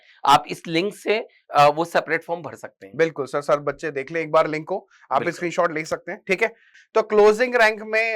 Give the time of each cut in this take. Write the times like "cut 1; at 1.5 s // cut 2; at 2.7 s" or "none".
cut 1; at 6.7 s